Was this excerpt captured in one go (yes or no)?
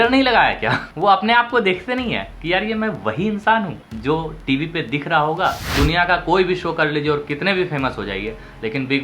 no